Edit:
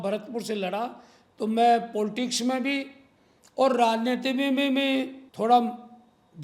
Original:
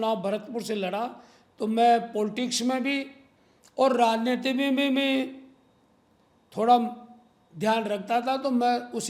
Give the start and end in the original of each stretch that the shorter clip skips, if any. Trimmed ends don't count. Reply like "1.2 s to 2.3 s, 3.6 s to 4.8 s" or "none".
5.4 s to 6.4 s